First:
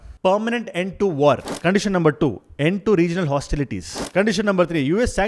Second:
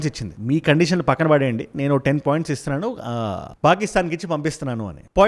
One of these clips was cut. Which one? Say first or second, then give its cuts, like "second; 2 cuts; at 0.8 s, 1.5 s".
first; 2 cuts; at 1.5 s, 3.9 s